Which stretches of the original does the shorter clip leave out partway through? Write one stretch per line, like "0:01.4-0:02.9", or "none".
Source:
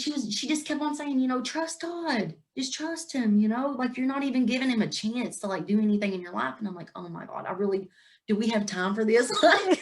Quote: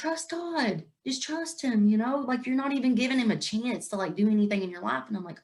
none